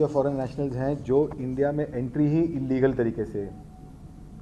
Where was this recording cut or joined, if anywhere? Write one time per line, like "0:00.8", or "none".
none